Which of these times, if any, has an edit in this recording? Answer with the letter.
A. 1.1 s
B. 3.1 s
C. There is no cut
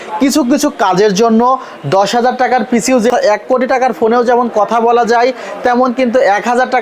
B